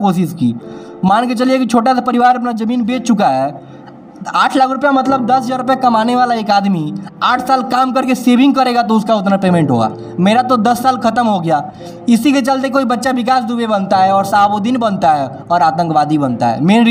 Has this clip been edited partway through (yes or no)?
no